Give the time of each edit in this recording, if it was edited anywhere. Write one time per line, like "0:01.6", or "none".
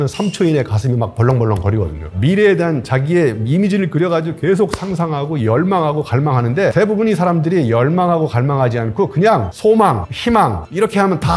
0:02.1
0:06.7